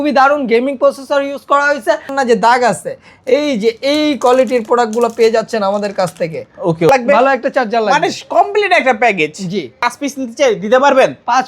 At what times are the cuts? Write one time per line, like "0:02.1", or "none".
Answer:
0:02.1
0:06.9
0:09.8

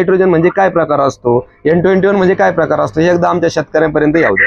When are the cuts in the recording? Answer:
none

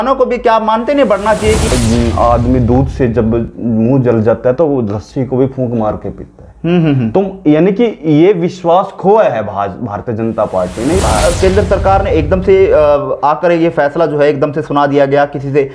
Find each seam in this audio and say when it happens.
0:01.7
0:11.0

